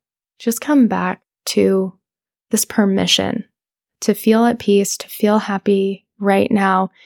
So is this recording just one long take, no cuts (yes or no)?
yes